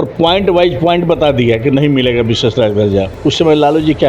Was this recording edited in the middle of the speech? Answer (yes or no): yes